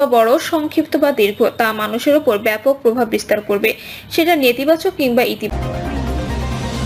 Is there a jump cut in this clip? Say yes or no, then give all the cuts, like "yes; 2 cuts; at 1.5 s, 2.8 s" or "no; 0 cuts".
yes; 1 cut; at 5.5 s